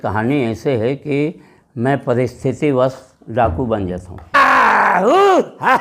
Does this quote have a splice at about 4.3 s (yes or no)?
yes